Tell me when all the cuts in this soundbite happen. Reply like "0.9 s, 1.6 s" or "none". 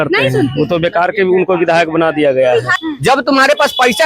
2.8 s